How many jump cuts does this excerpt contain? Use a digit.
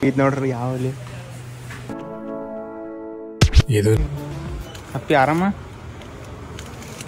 1